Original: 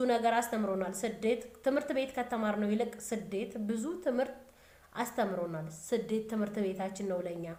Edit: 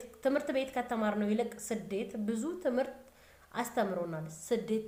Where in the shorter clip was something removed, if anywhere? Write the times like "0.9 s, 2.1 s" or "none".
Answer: none